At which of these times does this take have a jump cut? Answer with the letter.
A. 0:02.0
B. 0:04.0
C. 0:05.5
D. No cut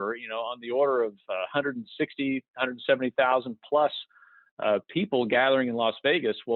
D